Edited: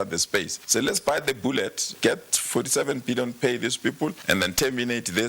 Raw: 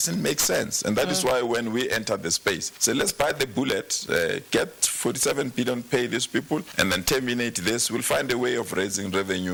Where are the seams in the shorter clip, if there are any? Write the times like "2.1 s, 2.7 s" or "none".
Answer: 1.9 s

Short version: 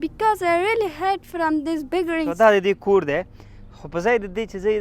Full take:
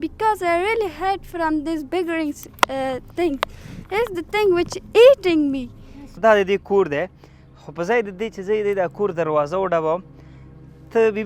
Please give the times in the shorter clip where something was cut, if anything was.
2.3 s

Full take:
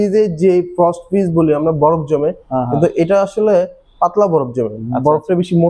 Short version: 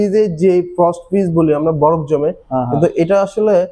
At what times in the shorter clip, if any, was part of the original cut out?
none

